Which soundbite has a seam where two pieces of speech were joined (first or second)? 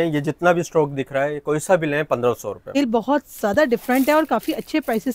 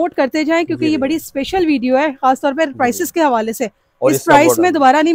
first